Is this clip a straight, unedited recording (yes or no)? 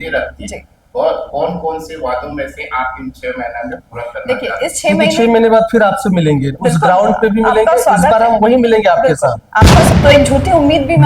no